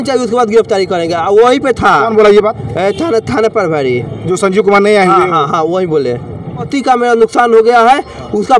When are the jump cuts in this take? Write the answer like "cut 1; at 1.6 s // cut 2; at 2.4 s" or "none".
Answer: cut 1; at 6.7 s